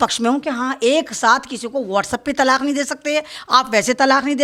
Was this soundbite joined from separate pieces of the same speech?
no; 0 cuts

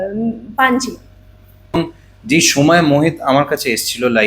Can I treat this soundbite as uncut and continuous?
no; 1 cut; at 1.7 s

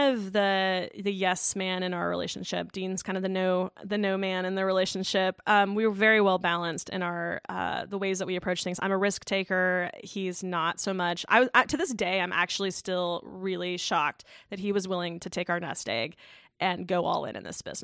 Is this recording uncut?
yes; 0 cuts

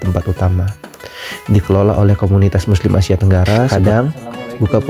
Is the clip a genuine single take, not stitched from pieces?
no; 1 cut; at 3.7 s

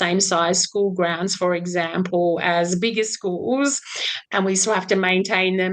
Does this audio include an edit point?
no; 0 cuts

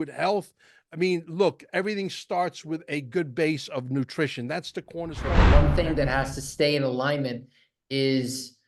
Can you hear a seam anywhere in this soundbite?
yes; 1 cut; at 5.5 s

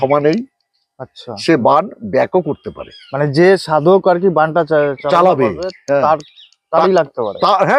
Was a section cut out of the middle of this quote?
no; 0 cuts

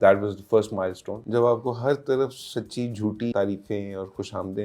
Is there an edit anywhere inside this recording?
yes; 2 cuts; at 1.1 s, 3.3 s

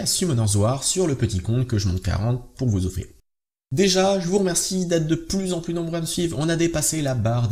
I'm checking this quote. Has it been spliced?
no; 0 cuts

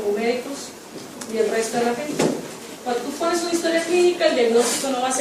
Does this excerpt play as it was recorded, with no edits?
yes; 0 cuts

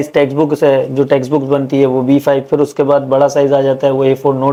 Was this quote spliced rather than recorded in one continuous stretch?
no; 0 cuts

